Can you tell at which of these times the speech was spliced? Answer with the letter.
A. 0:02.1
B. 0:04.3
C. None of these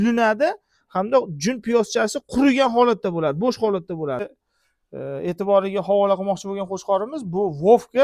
B